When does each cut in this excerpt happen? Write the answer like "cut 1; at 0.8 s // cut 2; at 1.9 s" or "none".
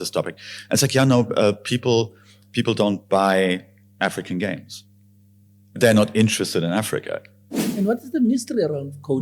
cut 1; at 7.6 s